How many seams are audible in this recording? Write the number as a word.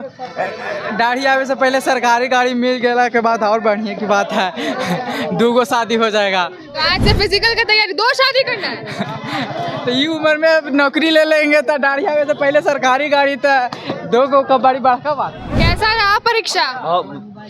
one